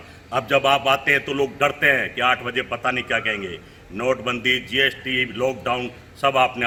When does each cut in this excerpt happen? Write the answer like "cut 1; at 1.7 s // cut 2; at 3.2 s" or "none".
none